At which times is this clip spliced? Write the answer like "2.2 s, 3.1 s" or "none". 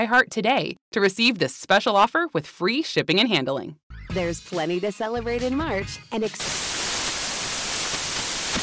3.9 s